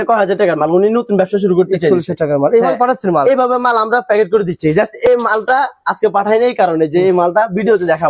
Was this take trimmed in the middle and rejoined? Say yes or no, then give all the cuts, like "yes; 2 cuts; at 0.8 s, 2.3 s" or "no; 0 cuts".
no; 0 cuts